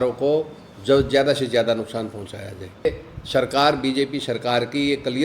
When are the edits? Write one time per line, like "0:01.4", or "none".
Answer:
0:02.9